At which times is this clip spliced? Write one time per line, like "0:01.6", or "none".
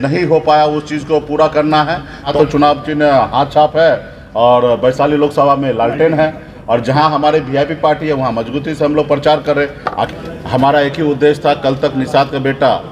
0:02.3
0:10.1